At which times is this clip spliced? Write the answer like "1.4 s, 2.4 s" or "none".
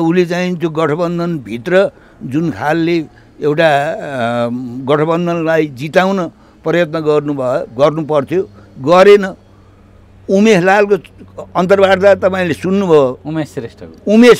none